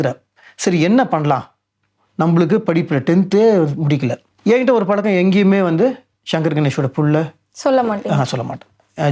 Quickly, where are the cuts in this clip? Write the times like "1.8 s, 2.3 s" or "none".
4.3 s

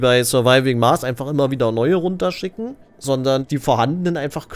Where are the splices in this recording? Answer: 2.9 s, 3.5 s

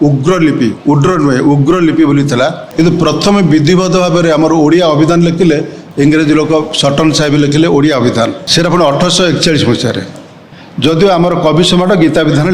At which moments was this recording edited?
2.6 s, 5.8 s, 8.4 s

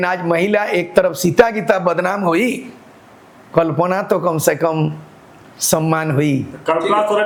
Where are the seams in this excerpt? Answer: none

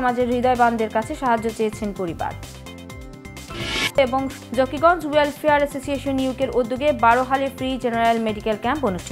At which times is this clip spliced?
none

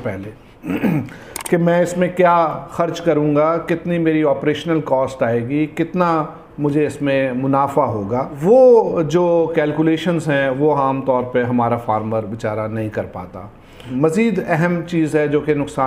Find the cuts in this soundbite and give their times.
8.4 s, 13.9 s

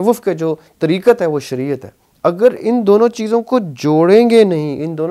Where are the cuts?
none

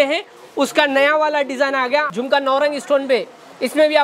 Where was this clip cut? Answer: 2.1 s

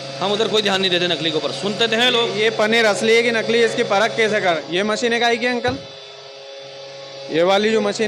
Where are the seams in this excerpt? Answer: 4.6 s

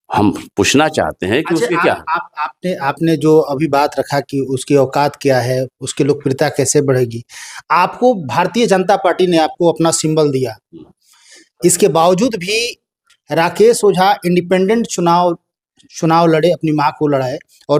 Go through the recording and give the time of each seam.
none

